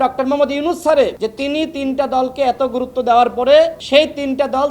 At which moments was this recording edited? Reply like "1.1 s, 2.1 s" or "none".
1.2 s, 3.8 s